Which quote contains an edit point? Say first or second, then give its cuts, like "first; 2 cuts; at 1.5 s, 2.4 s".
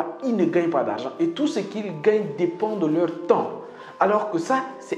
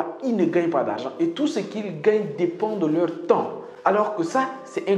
second; 1 cut; at 3.6 s